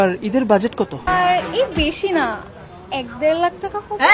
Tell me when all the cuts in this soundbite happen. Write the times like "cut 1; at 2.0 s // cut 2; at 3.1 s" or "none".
cut 1; at 1.1 s